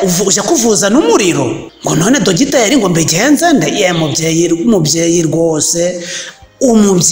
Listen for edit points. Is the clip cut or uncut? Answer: cut